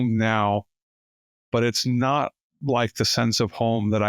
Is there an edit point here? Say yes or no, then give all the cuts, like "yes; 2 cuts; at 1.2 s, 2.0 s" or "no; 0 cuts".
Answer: no; 0 cuts